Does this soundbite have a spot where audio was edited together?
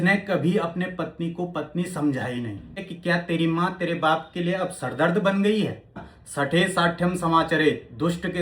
yes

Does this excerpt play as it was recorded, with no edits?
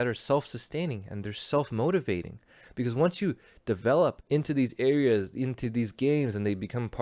yes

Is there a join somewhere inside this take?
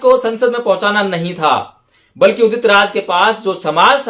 no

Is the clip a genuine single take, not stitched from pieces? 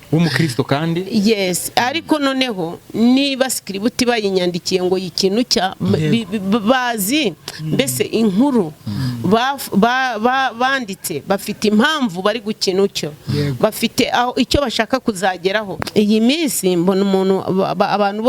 no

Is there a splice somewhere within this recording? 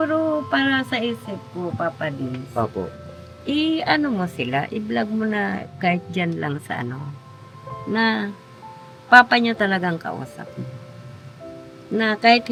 no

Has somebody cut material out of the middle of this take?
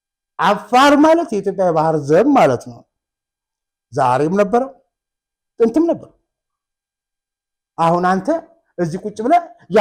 no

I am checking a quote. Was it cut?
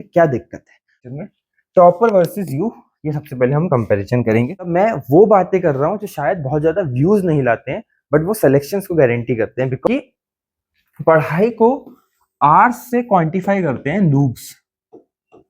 yes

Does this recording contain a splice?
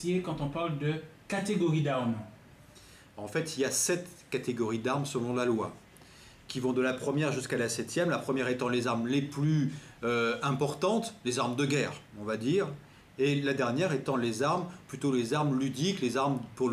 yes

